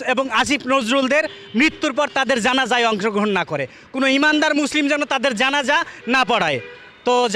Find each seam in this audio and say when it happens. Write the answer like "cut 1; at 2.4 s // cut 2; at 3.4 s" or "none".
none